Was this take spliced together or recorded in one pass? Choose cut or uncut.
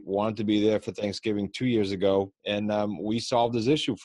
cut